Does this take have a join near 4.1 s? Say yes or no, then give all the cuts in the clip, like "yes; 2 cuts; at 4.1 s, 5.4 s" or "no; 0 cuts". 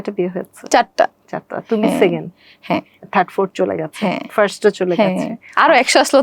no; 0 cuts